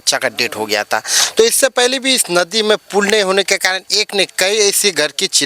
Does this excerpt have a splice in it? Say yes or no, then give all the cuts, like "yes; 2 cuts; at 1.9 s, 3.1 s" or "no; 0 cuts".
no; 0 cuts